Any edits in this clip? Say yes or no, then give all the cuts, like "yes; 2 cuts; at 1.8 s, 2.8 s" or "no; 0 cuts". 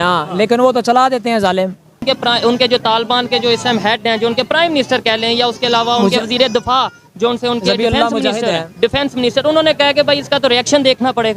yes; 1 cut; at 2.0 s